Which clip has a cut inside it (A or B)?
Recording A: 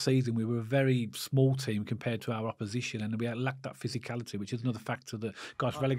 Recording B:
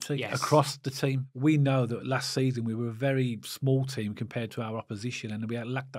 B